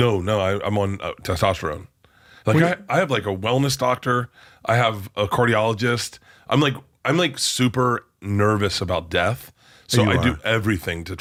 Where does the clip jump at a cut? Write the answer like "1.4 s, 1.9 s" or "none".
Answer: none